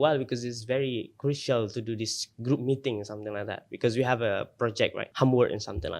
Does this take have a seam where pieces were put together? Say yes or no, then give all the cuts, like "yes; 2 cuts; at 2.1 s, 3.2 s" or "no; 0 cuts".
yes; 1 cut; at 5.0 s